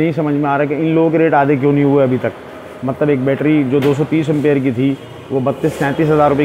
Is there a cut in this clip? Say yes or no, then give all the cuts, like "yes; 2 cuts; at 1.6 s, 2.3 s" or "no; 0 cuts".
no; 0 cuts